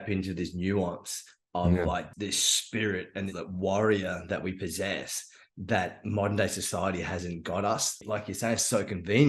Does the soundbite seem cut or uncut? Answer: cut